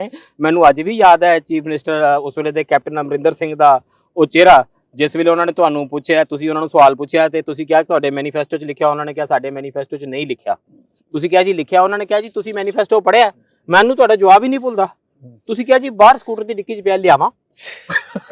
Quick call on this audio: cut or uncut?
uncut